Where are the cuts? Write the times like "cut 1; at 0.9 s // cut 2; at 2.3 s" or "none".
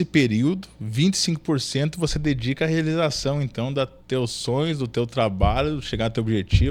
none